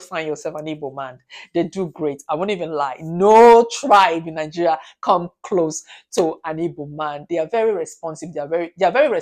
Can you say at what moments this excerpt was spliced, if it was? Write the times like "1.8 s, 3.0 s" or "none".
none